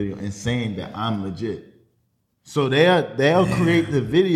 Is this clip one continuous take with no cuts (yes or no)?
yes